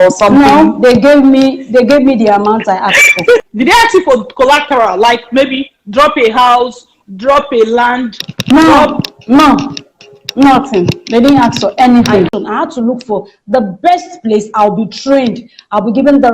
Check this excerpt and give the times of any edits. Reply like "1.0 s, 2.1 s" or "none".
3.5 s, 12.4 s